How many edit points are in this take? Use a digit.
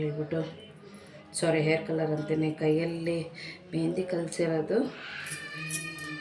0